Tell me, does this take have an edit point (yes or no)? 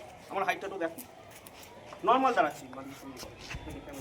no